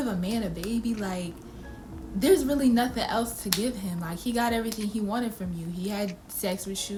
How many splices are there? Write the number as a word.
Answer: zero